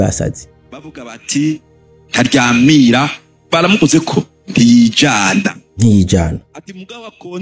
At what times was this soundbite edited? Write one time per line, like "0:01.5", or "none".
none

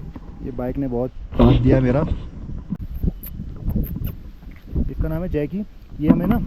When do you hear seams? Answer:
0:02.8

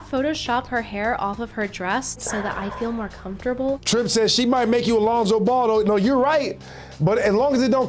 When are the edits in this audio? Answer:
0:02.2
0:03.8

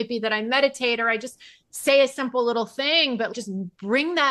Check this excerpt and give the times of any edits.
none

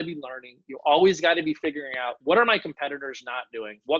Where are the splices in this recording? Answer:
0:02.2

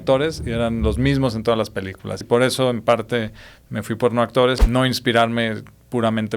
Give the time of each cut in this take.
0:02.2
0:04.6

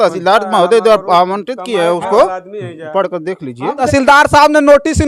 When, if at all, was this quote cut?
0:03.8

